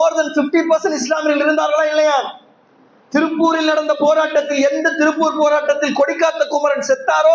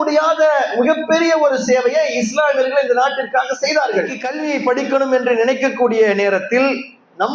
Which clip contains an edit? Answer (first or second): second